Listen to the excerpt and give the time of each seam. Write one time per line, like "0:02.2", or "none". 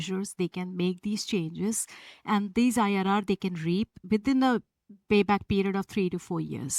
0:04.0